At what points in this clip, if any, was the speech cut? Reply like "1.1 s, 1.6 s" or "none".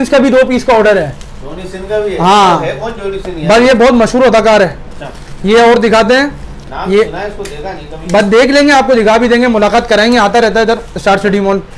none